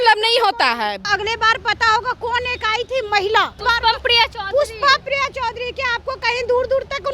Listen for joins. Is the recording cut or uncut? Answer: cut